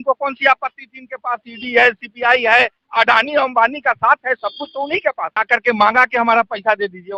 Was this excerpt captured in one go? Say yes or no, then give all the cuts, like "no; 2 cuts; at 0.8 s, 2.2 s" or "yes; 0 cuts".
no; 1 cut; at 5.3 s